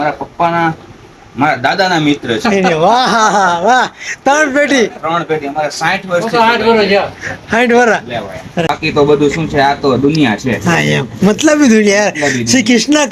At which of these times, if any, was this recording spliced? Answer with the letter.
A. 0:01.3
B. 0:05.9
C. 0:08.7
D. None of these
C